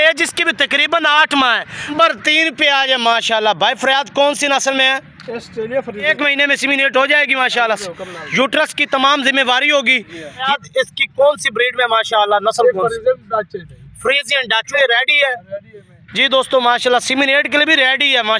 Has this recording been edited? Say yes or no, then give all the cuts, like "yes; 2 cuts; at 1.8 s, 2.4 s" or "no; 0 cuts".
yes; 4 cuts; at 2.0 s, 6.1 s, 10.4 s, 14.7 s